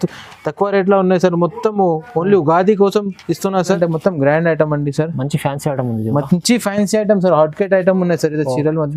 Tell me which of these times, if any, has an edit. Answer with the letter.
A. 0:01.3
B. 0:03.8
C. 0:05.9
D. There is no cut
B